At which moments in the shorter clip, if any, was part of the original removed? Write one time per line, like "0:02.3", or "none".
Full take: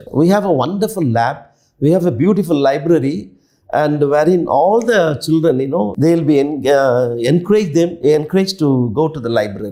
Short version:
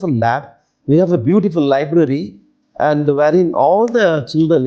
none